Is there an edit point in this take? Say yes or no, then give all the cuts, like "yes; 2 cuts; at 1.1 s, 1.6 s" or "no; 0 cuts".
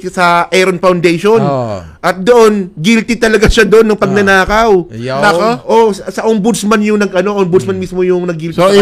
no; 0 cuts